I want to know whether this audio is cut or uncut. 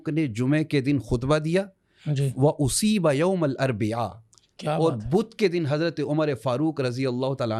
uncut